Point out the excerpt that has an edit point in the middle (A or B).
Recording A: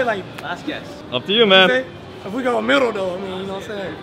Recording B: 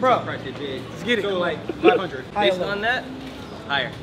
A